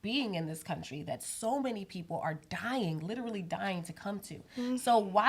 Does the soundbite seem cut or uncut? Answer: uncut